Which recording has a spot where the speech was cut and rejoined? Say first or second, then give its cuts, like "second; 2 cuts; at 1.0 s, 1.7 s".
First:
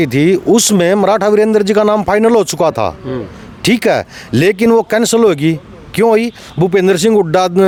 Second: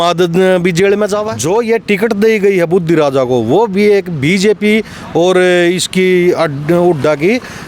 second; 1 cut; at 1.1 s